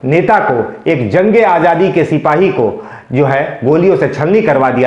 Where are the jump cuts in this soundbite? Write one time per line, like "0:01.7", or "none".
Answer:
none